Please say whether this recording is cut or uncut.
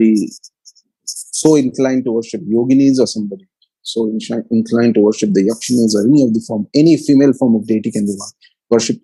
uncut